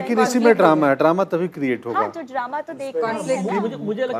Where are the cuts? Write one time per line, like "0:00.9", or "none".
none

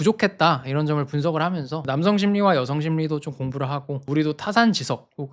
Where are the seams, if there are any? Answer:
0:01.8
0:04.0

